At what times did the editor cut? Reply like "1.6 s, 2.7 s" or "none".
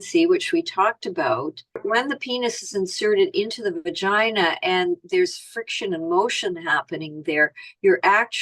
1.8 s